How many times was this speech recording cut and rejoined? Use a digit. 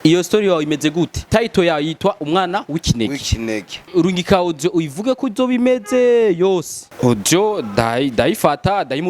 3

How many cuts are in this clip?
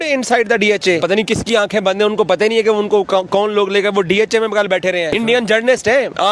2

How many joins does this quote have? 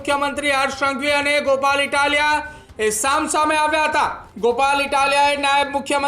1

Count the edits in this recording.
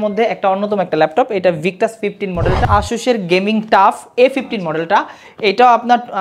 1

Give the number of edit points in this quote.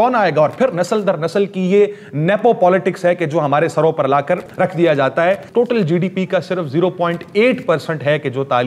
2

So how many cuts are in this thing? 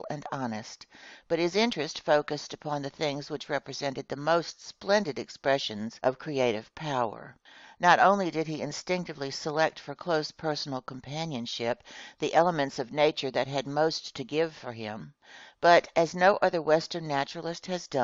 0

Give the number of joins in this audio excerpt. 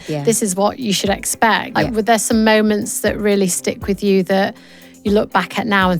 1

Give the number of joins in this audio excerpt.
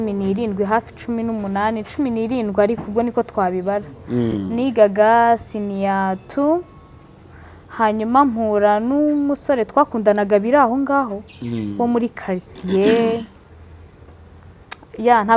0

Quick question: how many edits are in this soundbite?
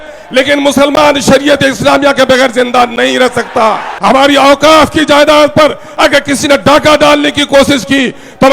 1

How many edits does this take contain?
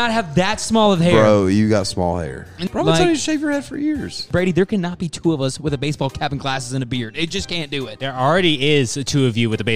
3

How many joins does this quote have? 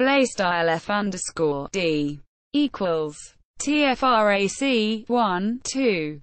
0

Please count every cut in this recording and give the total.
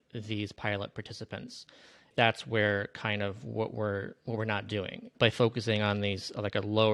2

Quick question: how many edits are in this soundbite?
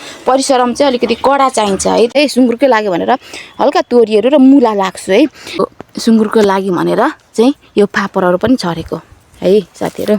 2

